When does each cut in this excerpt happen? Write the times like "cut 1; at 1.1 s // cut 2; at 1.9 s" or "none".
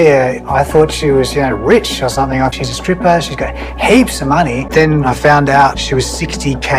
cut 1; at 2.5 s // cut 2; at 4.7 s